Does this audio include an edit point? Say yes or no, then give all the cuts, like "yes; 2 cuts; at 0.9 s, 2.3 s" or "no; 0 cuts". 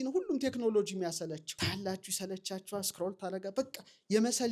yes; 1 cut; at 1.5 s